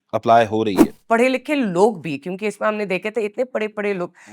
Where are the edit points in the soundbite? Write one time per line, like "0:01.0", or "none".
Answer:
0:01.0